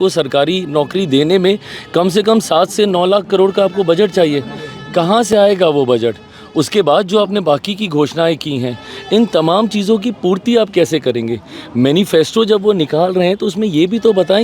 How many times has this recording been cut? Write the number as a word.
zero